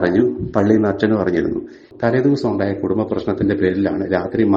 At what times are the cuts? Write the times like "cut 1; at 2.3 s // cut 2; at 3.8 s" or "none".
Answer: cut 1; at 1.8 s